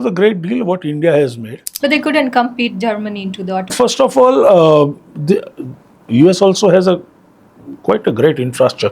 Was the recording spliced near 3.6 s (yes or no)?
yes